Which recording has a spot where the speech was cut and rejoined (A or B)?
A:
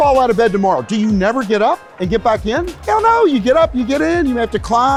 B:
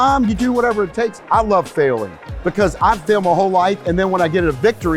B